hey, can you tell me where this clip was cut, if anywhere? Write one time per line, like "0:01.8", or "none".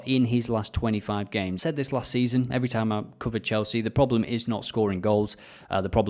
0:01.5

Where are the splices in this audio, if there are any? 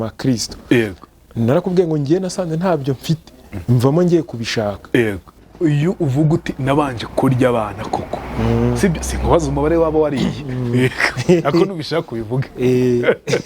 0:05.4

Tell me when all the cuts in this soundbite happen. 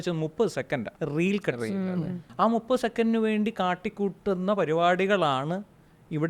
0:00.9
0:02.2

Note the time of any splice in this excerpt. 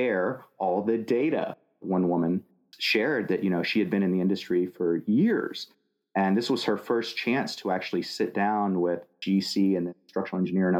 0:01.7

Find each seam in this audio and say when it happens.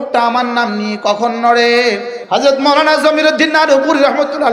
0:02.1

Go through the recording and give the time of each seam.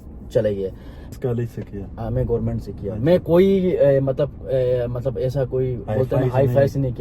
0:01.1

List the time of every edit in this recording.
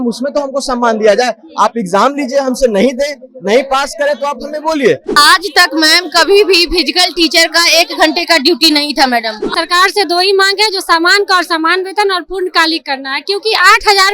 0:05.1
0:09.4

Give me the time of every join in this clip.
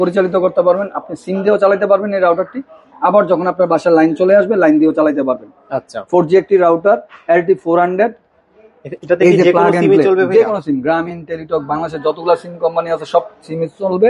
none

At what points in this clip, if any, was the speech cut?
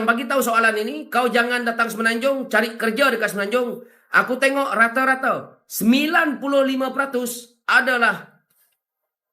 none

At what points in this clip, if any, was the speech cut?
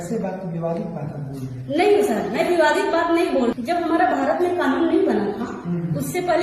0:03.5

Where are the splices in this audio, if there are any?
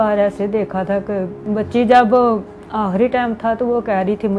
0:01.4

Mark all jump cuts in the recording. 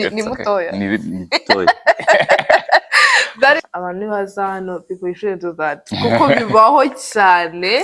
0:03.6

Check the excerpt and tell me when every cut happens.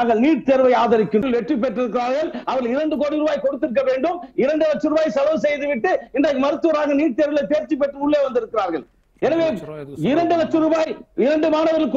0:01.2

